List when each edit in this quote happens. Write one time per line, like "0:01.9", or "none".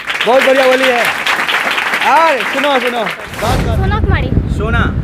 0:03.3